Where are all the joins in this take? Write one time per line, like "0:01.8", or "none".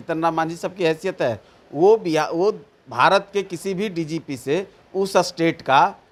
none